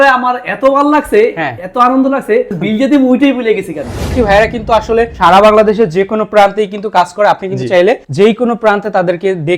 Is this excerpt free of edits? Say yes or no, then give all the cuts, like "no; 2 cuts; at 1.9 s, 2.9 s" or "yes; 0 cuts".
no; 1 cut; at 4.1 s